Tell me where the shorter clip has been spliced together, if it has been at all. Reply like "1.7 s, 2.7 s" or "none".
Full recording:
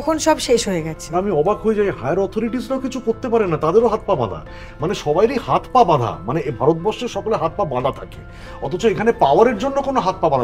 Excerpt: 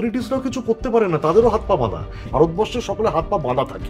2.2 s

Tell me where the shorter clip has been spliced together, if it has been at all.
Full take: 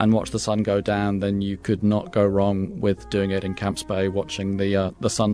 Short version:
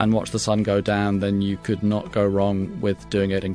none

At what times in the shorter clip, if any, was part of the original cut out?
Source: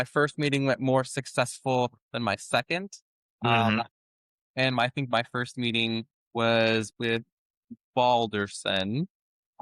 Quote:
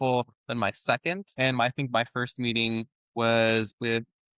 1.3 s

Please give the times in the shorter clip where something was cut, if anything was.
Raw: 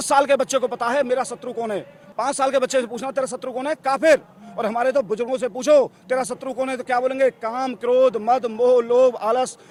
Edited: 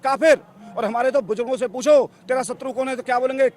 none

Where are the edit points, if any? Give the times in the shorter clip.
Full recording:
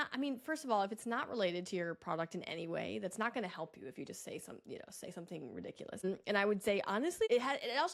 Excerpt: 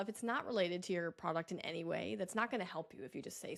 none

